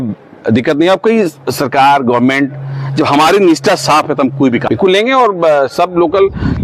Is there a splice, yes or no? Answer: yes